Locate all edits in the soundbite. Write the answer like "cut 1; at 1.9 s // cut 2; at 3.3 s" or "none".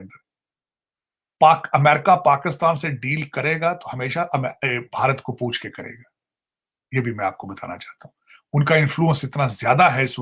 none